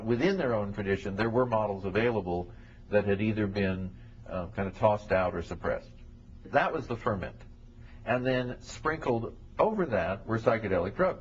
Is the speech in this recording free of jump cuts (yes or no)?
no